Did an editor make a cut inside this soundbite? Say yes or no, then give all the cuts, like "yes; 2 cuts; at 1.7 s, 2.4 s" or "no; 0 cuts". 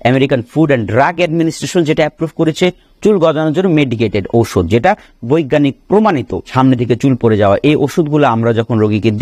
yes; 1 cut; at 6.5 s